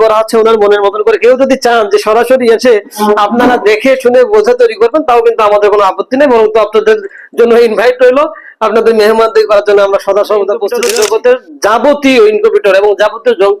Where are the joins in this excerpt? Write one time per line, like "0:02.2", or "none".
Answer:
0:10.7